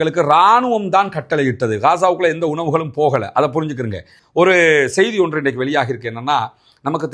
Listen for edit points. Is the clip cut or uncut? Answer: cut